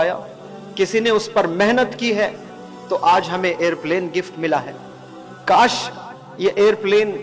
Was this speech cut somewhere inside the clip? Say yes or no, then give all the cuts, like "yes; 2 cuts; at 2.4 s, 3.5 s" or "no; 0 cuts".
no; 0 cuts